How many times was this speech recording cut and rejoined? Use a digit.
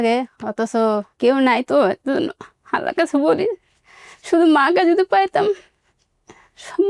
1